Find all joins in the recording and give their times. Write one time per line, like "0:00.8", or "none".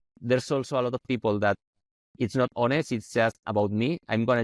none